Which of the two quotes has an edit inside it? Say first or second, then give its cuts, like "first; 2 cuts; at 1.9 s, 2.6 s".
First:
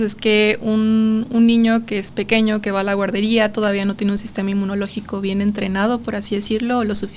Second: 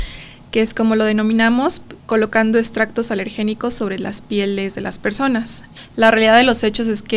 second; 1 cut; at 5.6 s